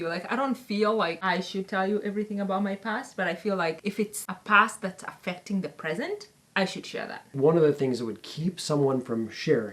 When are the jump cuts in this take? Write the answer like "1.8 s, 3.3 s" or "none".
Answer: 1.2 s, 4.0 s, 6.4 s, 7.4 s